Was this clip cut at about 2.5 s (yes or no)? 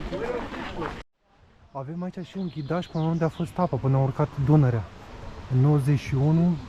no